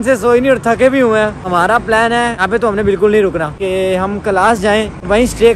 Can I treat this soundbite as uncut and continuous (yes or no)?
yes